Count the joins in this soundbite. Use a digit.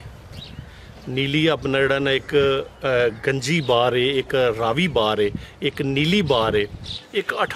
0